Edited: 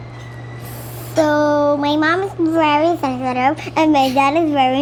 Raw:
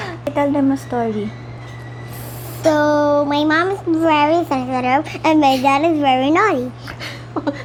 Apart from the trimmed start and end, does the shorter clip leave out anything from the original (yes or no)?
no